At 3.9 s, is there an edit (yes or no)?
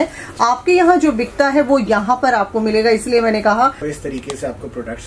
yes